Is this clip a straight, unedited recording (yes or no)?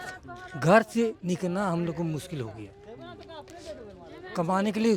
yes